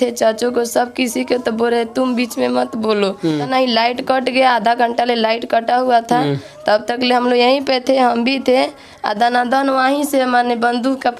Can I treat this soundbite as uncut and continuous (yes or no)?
no